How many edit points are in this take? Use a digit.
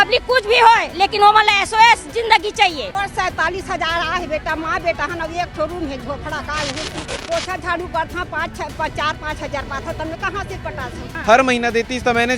3